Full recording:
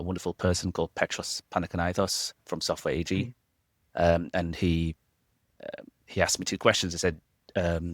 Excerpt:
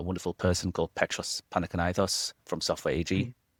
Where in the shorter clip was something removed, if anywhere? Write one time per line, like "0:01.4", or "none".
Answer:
none